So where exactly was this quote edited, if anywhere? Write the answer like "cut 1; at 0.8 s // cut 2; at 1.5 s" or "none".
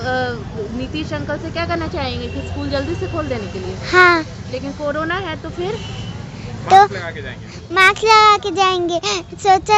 none

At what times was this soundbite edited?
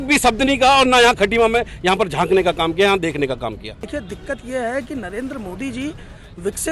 cut 1; at 3.9 s

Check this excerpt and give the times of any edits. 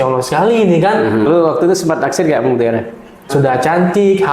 cut 1; at 1.3 s // cut 2; at 3.3 s

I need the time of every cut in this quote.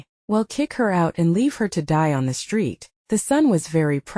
cut 1; at 2.9 s

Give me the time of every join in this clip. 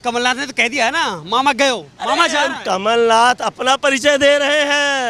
none

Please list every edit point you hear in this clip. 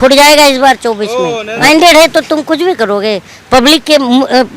cut 1; at 1.5 s

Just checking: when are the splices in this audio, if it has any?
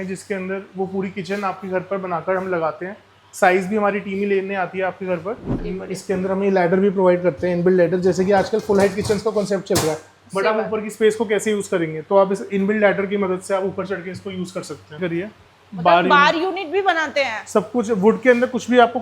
cut 1; at 5.6 s // cut 2; at 15.0 s

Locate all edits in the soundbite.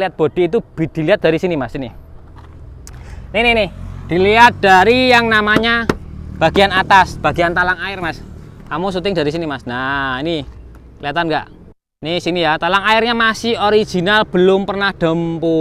none

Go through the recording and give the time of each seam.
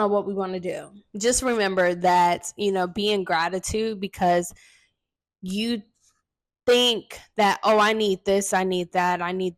cut 1; at 1.0 s

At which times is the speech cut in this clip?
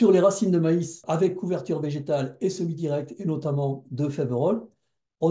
cut 1; at 1.0 s

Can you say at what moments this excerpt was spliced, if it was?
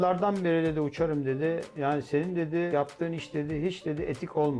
cut 1; at 2.7 s

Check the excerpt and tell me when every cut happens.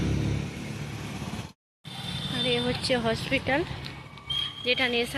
cut 1; at 1.5 s

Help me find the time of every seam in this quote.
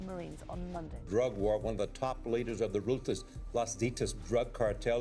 cut 1; at 1.0 s

